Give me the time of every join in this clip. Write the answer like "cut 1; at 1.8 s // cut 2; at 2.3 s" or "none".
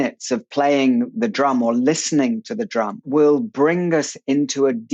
cut 1; at 3.0 s